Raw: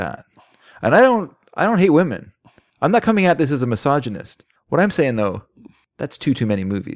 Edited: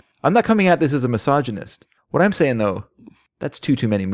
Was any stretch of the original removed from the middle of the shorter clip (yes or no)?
no